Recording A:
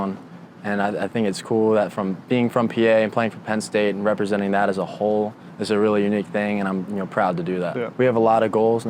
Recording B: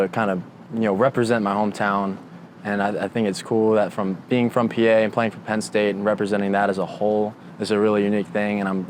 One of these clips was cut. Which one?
A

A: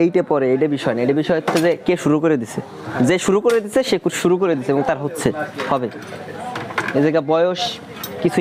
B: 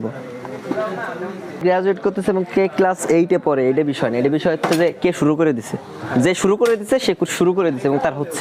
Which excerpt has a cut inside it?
B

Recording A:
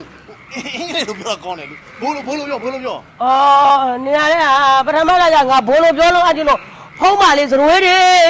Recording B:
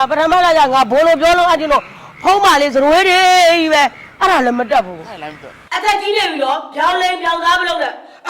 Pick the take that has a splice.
B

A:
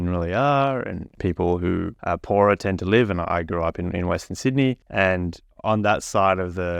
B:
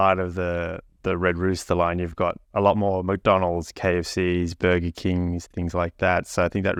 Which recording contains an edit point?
A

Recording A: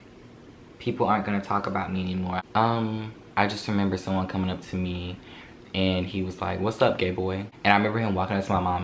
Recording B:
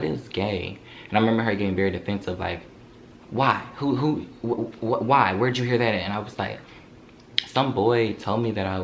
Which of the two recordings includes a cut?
A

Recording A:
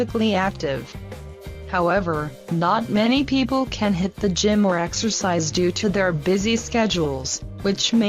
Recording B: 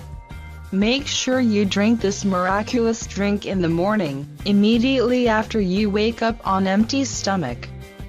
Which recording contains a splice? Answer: A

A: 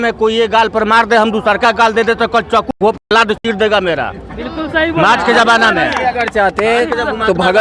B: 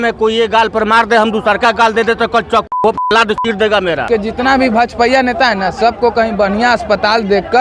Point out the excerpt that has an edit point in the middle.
B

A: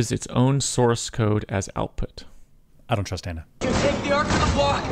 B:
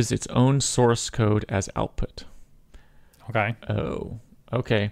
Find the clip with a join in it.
A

